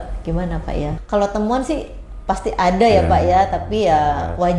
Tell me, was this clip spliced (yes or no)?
yes